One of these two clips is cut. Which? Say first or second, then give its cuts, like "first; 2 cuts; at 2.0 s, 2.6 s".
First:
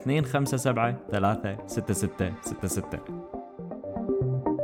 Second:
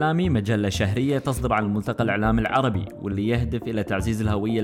first; 1 cut; at 2.8 s